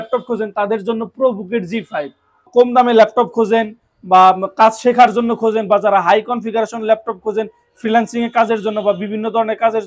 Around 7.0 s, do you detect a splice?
no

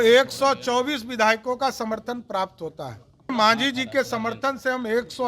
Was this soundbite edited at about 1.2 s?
no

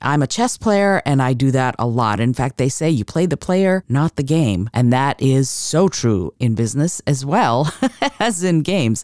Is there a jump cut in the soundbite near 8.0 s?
no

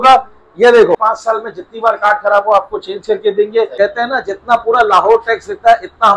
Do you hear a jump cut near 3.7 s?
yes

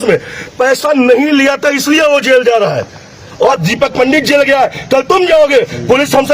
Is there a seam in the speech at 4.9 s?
no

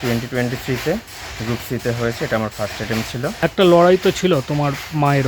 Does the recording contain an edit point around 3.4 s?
yes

